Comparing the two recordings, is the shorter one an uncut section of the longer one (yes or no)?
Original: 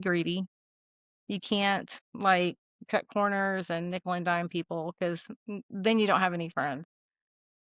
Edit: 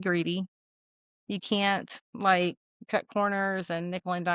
yes